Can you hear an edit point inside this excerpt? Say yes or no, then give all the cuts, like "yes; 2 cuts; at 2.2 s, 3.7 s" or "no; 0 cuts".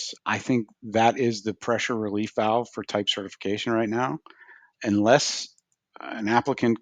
no; 0 cuts